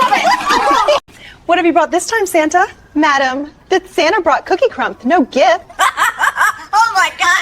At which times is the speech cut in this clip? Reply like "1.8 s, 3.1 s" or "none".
1.2 s